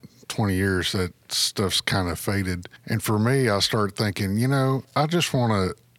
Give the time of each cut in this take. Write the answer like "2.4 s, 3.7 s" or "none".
2.7 s, 4.9 s